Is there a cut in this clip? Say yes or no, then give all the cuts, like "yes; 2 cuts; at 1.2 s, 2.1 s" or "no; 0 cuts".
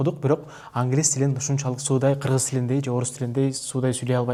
no; 0 cuts